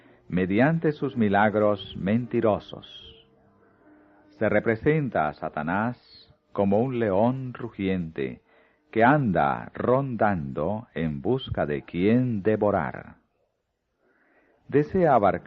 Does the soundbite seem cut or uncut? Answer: cut